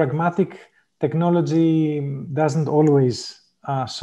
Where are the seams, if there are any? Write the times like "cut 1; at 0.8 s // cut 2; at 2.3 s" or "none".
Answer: cut 1; at 2.2 s

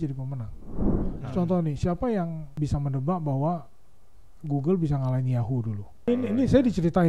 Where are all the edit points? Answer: cut 1; at 1.1 s // cut 2; at 2.5 s // cut 3; at 6.1 s

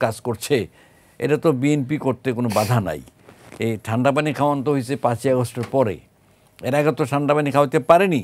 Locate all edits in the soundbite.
none

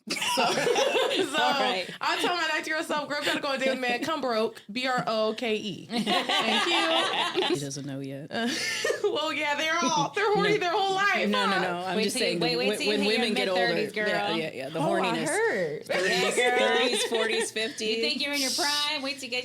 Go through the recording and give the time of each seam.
cut 1; at 7.6 s

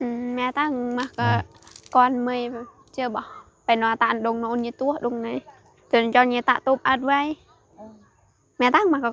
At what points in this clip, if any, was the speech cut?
none

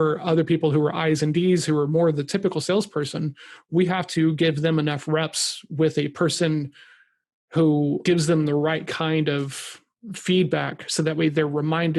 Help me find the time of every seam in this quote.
cut 1; at 8.0 s

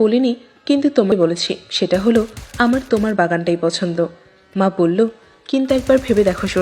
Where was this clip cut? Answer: cut 1; at 1.1 s

